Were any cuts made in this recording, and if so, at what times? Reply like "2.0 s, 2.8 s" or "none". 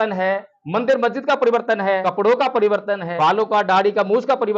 2.0 s, 3.1 s

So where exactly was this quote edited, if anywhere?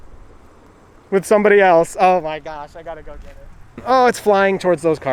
3.8 s

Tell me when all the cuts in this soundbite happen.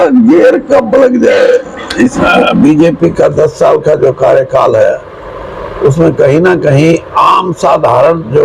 2.2 s

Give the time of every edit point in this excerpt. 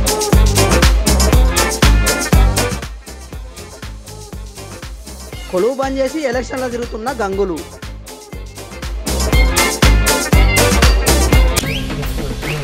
11.6 s

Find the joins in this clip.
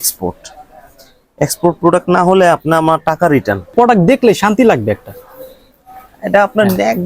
3.7 s

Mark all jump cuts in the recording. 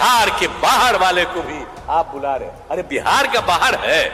none

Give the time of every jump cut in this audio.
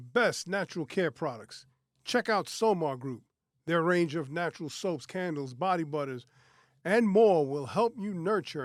none

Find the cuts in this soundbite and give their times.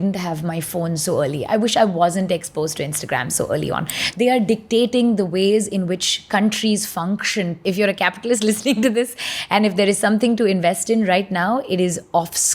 4.1 s, 7.6 s

